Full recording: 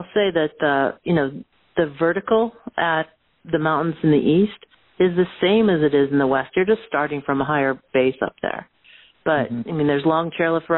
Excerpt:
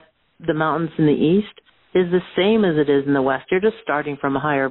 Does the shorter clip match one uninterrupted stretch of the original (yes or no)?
yes